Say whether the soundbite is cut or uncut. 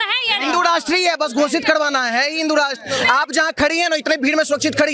uncut